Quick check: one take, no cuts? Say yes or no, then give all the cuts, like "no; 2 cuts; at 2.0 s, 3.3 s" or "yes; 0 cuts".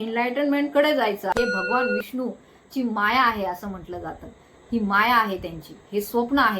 no; 1 cut; at 1.3 s